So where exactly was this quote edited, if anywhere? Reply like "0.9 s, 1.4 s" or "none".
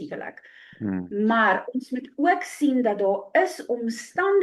none